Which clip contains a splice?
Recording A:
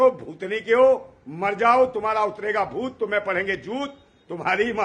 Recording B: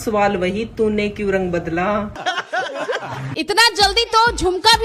B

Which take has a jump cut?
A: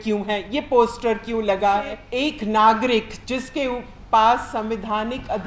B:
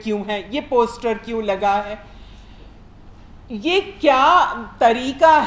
A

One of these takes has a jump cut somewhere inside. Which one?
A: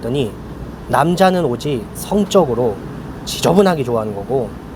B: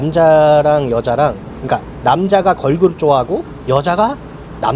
B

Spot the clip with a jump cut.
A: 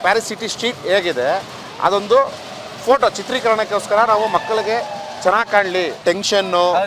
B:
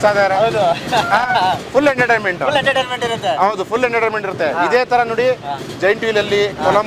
A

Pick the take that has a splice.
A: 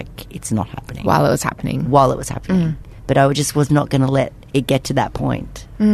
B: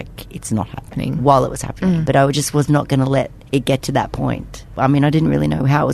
B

